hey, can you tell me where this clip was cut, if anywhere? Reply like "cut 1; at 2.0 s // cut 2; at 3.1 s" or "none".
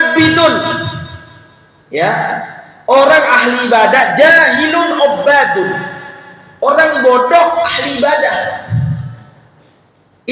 none